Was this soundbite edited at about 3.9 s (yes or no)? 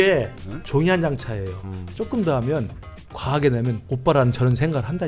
yes